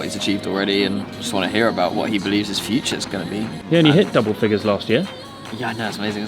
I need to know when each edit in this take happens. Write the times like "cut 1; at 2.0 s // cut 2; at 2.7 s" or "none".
cut 1; at 1.9 s // cut 2; at 3.6 s